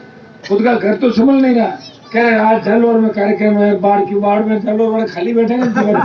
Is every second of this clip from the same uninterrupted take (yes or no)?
yes